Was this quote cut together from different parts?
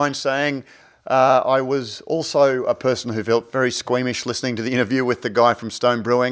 no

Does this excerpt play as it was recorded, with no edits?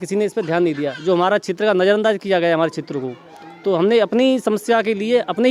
yes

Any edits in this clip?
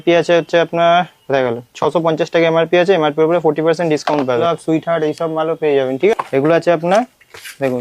yes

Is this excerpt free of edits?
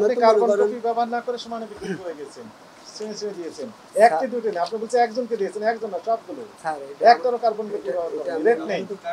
yes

